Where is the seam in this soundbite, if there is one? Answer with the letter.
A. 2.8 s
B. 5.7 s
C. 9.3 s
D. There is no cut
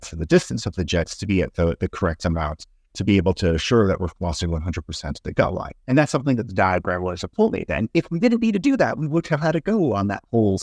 B